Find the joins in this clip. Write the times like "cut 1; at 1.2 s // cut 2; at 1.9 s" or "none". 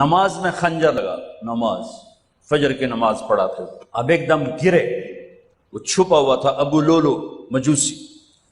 cut 1; at 1.0 s